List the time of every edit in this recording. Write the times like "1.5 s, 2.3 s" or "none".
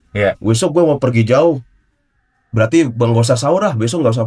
none